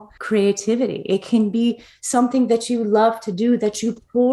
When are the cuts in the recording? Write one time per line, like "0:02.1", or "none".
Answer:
none